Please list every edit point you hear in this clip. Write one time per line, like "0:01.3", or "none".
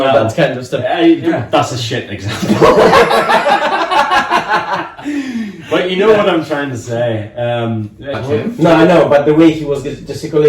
0:08.2